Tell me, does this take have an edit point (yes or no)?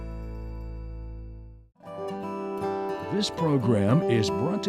yes